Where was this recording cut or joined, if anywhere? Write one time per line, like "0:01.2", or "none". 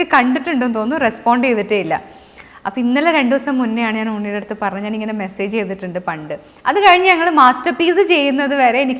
none